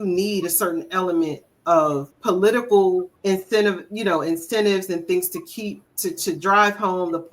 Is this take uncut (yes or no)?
no